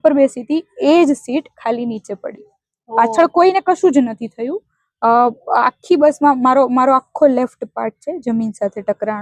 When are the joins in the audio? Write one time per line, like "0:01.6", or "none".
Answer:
none